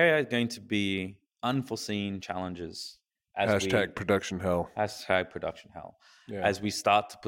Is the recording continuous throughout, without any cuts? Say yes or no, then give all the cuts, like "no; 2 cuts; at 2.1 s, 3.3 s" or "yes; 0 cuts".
no; 1 cut; at 1.2 s